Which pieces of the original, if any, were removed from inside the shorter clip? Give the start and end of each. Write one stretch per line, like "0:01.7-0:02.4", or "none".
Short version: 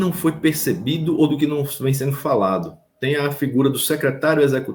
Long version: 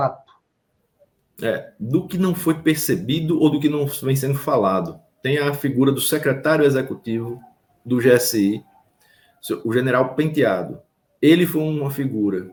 none